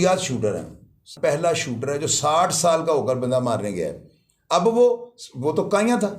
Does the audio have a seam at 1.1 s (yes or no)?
yes